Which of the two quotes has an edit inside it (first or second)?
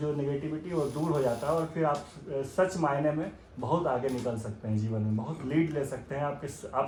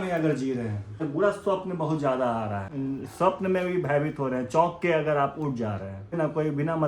second